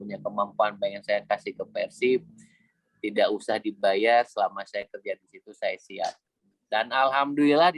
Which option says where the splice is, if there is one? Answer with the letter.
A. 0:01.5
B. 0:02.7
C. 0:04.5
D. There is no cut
D